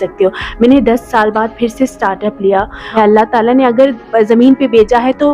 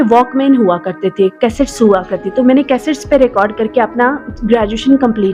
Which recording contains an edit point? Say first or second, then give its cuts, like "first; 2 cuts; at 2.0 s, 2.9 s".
first; 1 cut; at 2.9 s